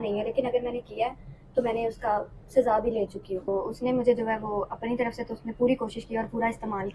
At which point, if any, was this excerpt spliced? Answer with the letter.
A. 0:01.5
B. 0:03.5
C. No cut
B